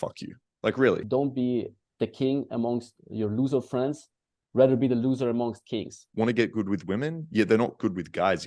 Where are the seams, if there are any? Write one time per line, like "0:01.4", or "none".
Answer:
0:01.0
0:06.0